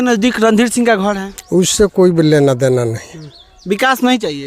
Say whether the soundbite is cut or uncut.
uncut